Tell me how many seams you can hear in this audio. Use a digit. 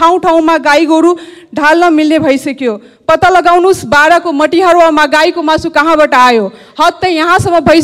0